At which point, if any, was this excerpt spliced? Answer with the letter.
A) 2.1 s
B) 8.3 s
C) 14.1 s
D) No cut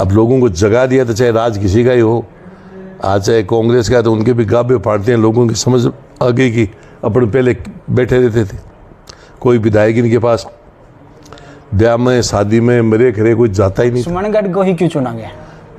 C